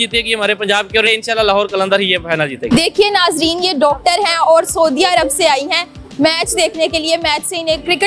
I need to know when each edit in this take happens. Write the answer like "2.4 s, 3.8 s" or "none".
1.1 s, 2.6 s